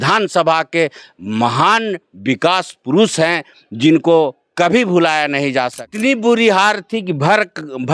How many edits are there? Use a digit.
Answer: 1